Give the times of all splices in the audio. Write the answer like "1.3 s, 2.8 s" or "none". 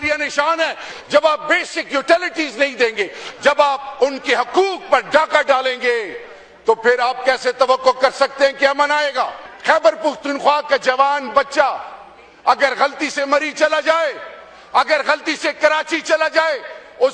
0.9 s, 9.5 s